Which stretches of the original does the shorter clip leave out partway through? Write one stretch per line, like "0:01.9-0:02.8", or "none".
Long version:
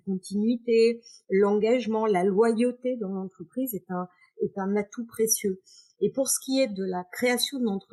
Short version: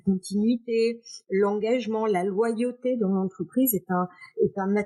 none

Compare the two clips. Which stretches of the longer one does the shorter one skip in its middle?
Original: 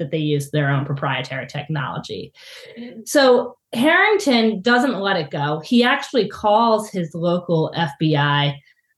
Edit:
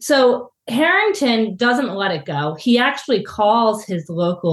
none

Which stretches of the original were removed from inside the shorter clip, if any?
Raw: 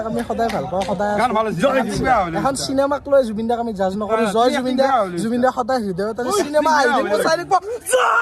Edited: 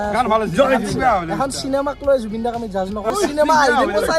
0:04.2-0:06.3

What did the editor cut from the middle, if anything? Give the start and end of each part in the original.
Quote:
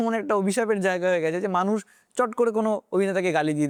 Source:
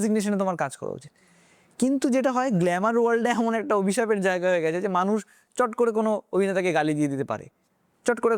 none

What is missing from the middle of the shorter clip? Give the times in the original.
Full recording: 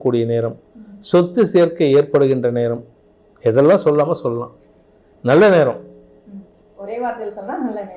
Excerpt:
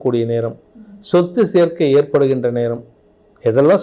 none

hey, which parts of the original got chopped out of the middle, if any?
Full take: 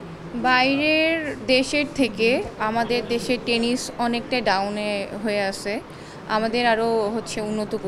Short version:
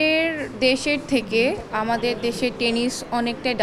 none

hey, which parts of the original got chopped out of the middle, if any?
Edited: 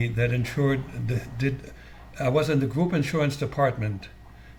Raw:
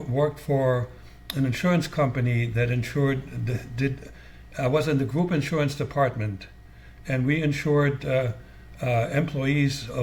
none

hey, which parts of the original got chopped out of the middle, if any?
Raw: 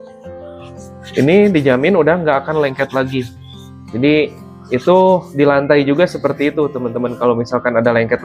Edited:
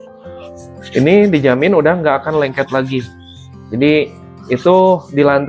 0:00.9-0:01.1

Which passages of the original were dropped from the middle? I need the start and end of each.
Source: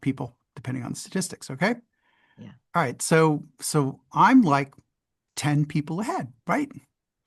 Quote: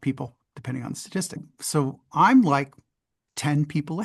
0:01.5-0:03.5

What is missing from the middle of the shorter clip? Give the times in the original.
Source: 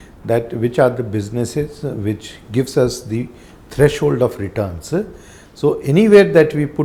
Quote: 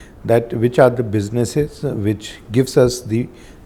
none

